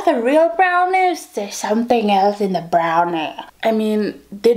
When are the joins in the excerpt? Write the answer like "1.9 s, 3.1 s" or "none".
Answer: 3.4 s